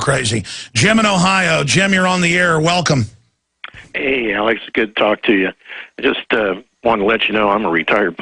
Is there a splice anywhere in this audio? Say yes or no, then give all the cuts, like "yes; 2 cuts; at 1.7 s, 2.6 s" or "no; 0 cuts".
yes; 1 cut; at 1.0 s